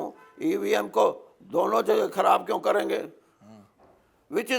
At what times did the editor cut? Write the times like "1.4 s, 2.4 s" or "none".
none